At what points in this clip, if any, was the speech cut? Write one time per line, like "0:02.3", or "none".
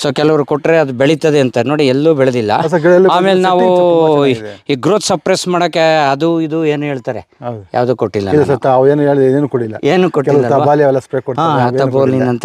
none